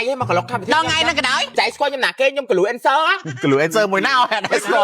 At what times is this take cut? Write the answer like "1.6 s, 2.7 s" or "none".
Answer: 1.5 s, 3.2 s